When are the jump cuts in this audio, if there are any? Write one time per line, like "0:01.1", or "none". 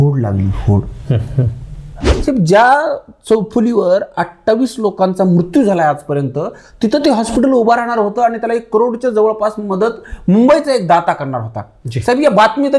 0:02.0